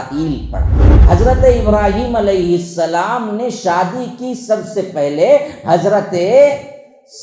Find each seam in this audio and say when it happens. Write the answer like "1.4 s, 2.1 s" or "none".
0.9 s

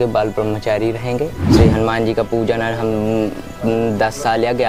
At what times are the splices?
1.4 s

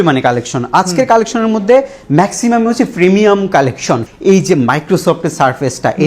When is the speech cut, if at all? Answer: 4.0 s

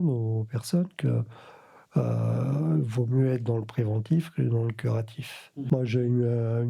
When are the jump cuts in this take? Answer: 5.7 s

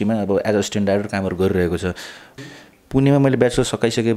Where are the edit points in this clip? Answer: 2.2 s

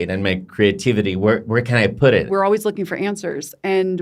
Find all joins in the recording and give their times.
2.3 s

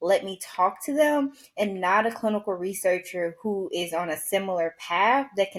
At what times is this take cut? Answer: none

